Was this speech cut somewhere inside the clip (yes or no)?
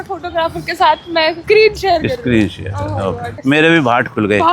yes